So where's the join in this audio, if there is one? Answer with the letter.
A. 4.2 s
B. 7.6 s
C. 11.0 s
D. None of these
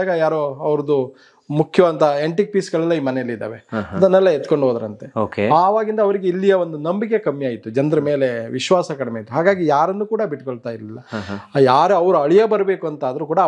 D